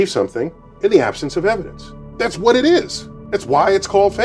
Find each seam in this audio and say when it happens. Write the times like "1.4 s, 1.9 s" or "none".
none